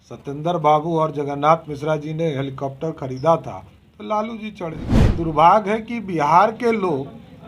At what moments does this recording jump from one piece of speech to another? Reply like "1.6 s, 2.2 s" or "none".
4.9 s